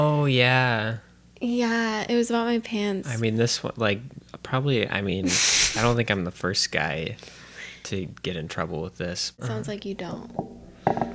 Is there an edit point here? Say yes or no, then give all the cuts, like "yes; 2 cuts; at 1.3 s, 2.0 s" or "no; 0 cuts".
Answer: yes; 1 cut; at 9.4 s